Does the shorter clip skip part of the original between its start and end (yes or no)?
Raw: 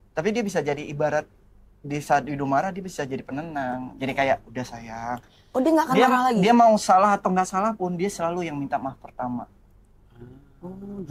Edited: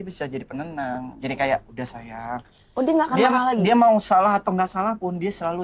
no